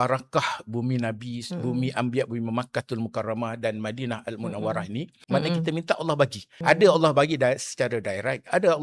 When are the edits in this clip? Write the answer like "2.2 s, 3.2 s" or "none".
5.1 s, 6.5 s

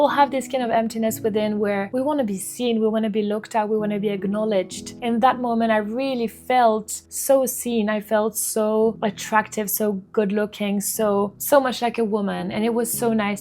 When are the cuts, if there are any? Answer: 1.9 s

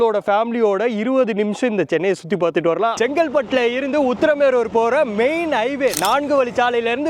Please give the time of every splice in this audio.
2.9 s

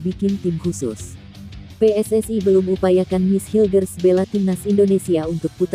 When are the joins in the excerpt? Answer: 1.6 s

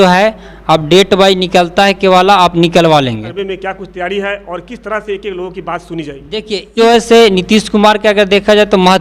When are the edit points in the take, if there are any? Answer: 3.3 s, 6.7 s

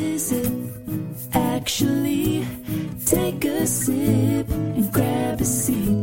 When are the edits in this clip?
none

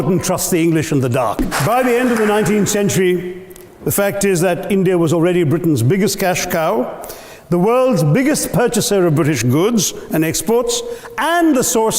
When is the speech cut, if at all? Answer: 1.5 s

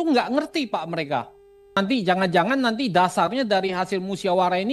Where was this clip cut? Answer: 1.8 s

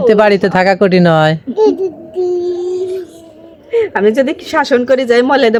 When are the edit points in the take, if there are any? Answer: none

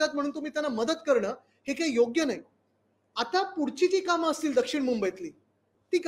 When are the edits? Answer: none

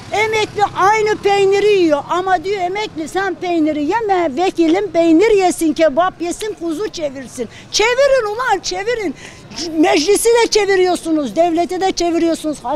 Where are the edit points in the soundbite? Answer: none

